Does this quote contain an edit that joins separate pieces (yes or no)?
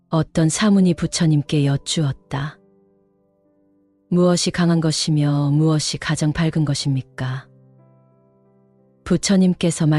yes